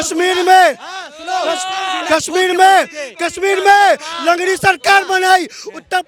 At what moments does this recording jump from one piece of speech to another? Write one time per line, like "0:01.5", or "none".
none